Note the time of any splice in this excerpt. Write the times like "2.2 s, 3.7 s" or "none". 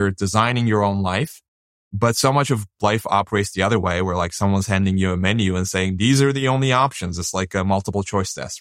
1.8 s